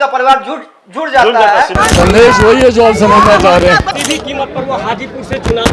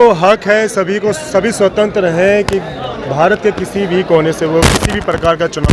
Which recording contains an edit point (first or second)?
first